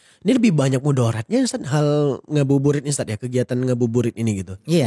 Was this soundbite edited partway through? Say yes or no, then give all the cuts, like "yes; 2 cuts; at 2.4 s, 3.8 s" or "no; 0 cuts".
no; 0 cuts